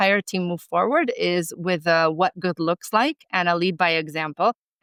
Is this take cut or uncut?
uncut